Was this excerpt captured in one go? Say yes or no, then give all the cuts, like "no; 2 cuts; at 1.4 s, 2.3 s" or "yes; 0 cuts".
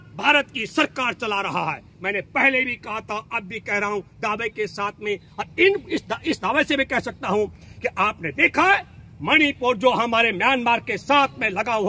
yes; 0 cuts